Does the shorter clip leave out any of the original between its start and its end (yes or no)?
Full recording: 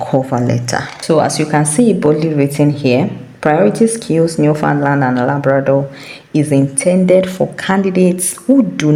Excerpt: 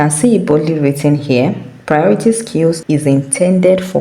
yes